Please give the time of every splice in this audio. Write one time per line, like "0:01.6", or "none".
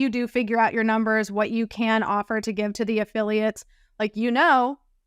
none